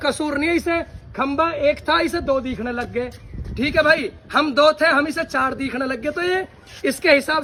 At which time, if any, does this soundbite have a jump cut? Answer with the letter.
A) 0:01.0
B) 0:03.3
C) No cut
C